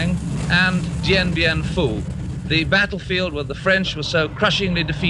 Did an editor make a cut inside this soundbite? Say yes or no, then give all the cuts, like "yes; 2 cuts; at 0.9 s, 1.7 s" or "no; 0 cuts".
yes; 1 cut; at 3.6 s